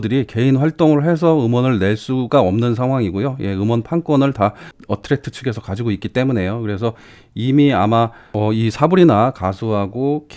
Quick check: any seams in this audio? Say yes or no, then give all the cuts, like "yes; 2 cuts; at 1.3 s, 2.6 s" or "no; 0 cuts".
yes; 1 cut; at 8.2 s